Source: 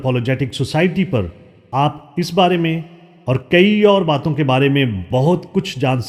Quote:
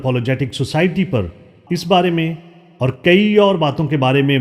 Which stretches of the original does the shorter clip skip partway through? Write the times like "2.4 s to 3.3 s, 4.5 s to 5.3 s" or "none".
1.6 s to 2.0 s